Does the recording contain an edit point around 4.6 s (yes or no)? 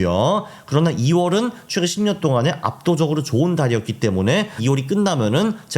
yes